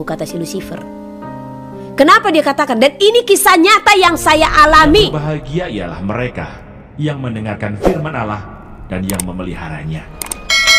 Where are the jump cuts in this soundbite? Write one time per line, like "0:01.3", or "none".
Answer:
0:05.5